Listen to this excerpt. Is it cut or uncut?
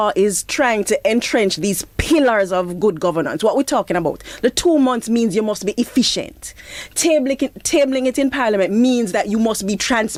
uncut